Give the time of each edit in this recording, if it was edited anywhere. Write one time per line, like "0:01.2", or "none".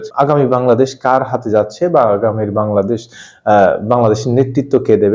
none